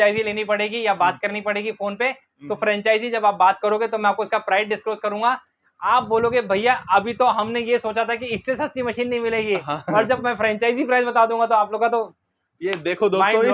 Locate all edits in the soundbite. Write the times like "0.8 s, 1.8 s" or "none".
none